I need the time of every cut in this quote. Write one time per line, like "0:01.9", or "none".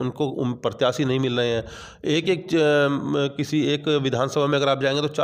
none